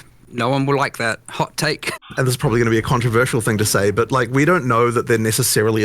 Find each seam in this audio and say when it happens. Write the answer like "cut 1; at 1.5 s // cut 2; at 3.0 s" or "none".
cut 1; at 2.0 s